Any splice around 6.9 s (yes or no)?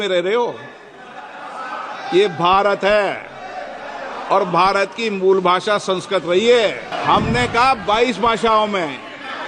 yes